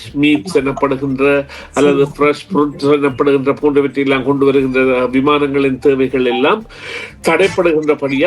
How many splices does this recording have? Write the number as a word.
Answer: zero